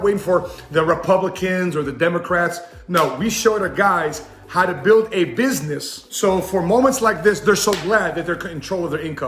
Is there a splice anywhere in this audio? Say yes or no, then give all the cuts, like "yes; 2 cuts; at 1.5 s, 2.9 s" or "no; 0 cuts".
no; 0 cuts